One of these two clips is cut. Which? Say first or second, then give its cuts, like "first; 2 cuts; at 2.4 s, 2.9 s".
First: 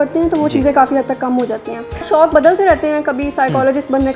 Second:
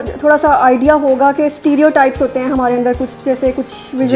first; 1 cut; at 2.1 s